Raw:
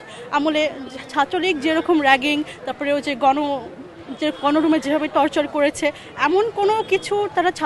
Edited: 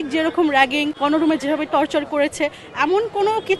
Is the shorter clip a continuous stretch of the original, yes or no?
no